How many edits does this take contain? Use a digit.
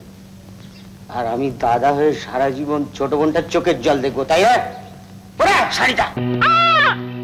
1